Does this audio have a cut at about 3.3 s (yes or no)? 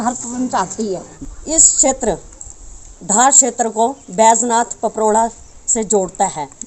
no